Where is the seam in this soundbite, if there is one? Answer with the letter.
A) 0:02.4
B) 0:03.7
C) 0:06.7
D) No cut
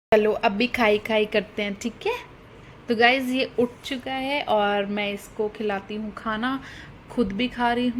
D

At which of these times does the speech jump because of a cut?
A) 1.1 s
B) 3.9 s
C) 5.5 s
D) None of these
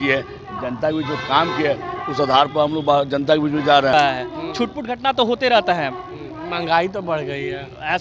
B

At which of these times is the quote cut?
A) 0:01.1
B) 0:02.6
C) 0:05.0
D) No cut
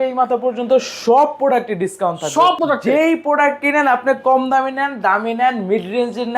B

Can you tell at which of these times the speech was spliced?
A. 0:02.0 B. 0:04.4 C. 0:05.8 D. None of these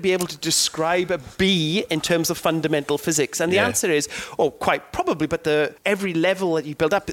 C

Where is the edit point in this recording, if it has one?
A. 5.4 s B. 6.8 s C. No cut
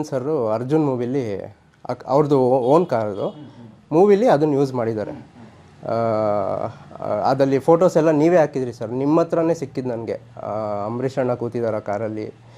C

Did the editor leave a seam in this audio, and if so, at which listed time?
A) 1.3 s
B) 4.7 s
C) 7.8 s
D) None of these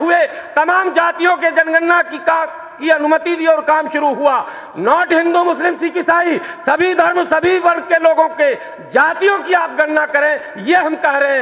D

